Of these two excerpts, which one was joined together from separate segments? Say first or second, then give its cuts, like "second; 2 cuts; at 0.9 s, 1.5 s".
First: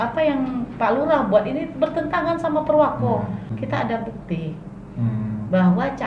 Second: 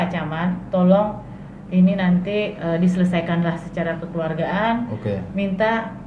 first; 1 cut; at 3.6 s